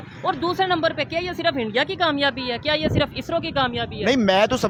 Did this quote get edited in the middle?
no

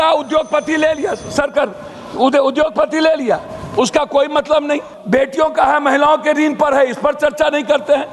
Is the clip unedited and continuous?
no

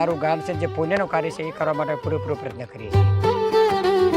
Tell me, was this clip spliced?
yes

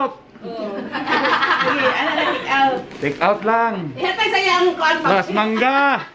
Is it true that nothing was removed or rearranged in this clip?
yes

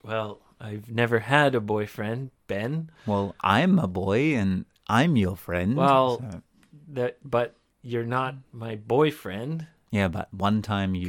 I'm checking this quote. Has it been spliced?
no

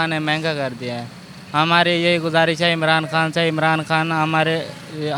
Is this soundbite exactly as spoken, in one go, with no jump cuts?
yes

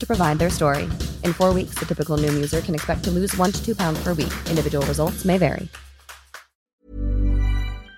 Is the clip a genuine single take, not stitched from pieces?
no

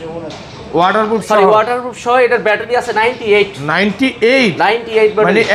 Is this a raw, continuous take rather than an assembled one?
yes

